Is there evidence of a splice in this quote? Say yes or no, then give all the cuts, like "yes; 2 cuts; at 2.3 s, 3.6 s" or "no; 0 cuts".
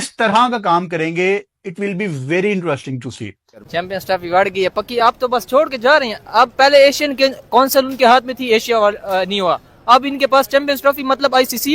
yes; 1 cut; at 3.5 s